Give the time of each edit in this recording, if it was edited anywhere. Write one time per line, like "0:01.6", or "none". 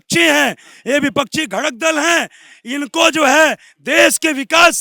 none